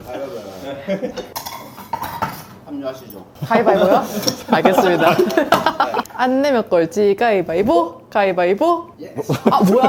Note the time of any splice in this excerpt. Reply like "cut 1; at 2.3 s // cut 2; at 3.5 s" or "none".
none